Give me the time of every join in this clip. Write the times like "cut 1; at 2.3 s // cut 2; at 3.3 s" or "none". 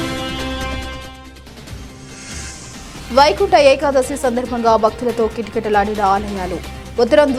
none